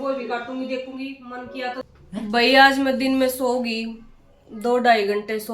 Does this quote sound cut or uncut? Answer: cut